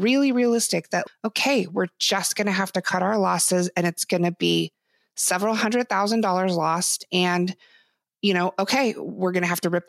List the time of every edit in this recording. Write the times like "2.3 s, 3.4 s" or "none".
1.0 s